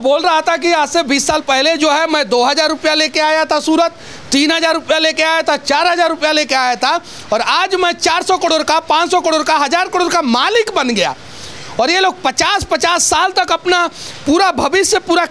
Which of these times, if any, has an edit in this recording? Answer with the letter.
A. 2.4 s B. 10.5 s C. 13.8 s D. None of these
D